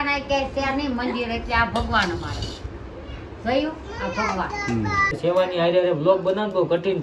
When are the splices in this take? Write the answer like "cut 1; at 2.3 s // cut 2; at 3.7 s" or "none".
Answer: cut 1; at 5.2 s